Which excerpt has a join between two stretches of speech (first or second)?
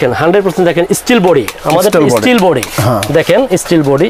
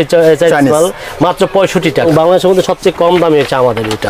second